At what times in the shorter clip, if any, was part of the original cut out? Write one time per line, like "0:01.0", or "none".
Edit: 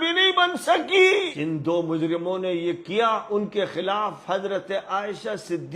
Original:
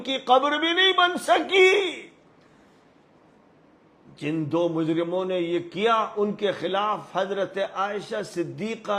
0:01.3